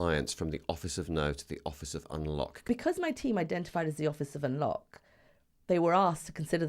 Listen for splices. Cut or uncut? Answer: cut